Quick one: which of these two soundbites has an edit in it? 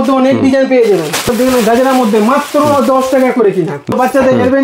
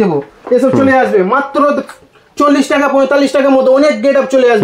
first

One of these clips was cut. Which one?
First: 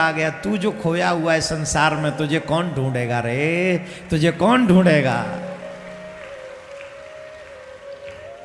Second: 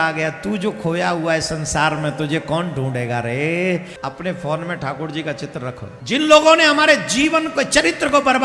second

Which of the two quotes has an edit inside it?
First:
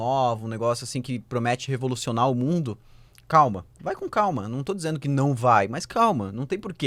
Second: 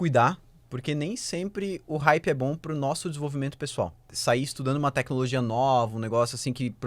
second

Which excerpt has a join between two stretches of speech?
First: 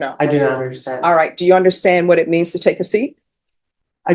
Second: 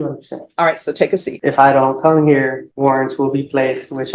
second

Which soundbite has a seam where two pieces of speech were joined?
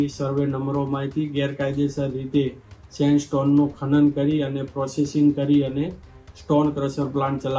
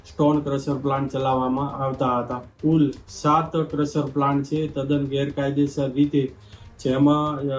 second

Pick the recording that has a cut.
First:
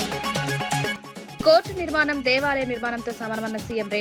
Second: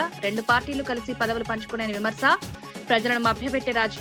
first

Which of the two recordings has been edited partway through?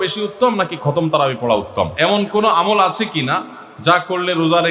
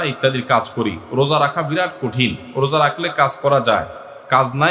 first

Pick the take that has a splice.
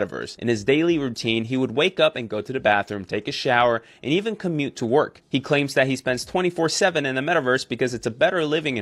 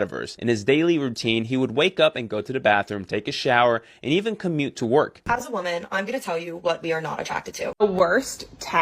second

